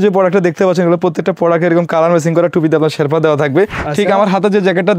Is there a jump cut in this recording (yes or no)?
yes